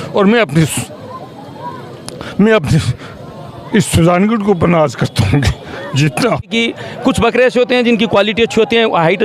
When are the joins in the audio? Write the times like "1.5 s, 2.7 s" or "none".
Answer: 6.5 s